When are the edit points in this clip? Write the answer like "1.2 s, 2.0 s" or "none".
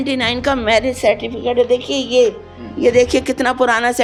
none